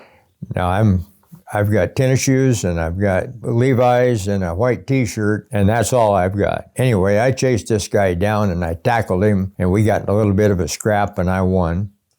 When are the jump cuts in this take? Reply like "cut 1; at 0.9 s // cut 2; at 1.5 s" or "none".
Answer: cut 1; at 3.4 s // cut 2; at 5.5 s // cut 3; at 6.7 s // cut 4; at 9.5 s